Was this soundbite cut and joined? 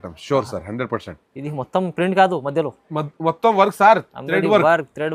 no; 0 cuts

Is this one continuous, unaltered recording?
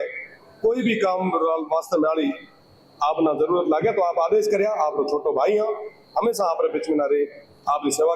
yes; 0 cuts

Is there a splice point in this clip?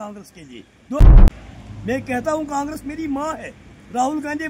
yes; 1 cut; at 1.1 s

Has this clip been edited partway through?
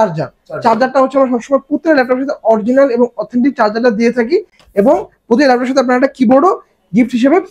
no; 0 cuts

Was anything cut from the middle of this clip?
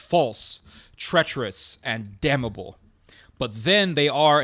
no; 0 cuts

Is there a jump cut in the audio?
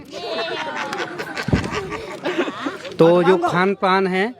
yes; 1 cut; at 2.7 s

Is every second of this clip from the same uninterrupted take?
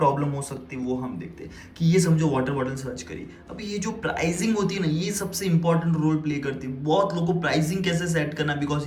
yes; 0 cuts

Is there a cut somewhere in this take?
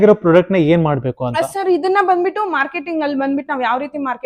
no; 0 cuts

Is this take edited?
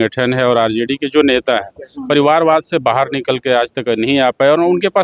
no; 0 cuts

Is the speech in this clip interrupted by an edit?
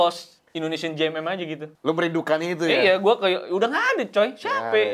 yes; 1 cut; at 1.7 s

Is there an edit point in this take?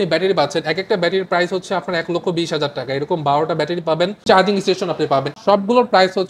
yes; 2 cuts; at 4.2 s, 5.3 s

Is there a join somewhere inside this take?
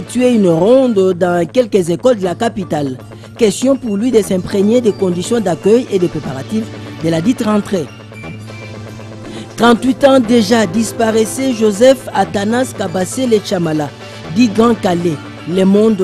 no; 0 cuts

